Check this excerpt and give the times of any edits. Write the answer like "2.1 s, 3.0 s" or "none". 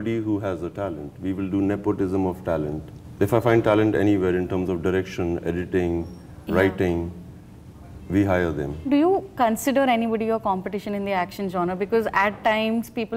8.9 s